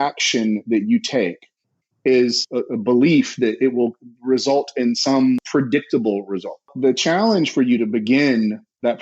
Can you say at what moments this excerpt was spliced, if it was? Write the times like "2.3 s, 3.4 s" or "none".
2.4 s, 5.4 s, 6.7 s